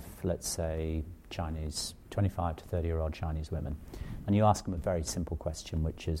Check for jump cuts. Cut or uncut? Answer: uncut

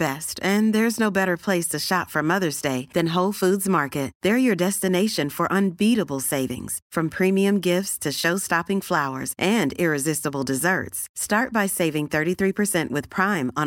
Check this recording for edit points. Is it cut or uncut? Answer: uncut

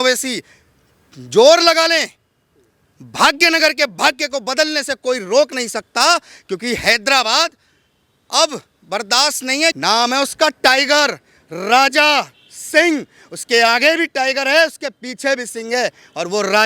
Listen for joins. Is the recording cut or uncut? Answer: cut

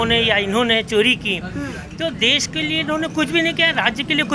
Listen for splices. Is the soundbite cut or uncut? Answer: uncut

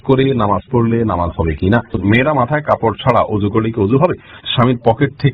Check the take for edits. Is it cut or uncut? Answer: cut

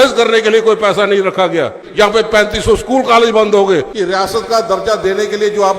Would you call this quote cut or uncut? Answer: cut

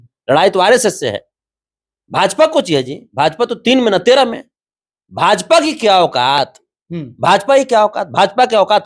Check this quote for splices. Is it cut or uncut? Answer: uncut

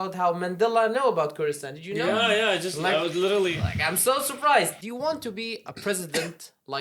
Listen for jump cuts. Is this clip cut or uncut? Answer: cut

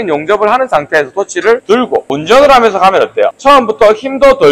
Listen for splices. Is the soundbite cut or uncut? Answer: cut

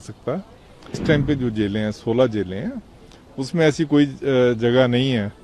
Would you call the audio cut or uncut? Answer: cut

